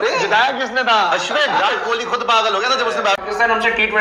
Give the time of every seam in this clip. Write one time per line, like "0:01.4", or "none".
0:01.6
0:03.2